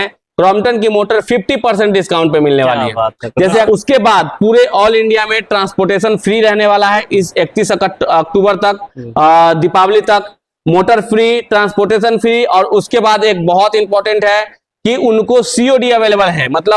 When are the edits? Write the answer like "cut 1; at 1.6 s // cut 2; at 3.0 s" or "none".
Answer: cut 1; at 3.6 s